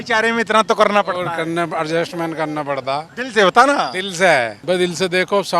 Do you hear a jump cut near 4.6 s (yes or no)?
yes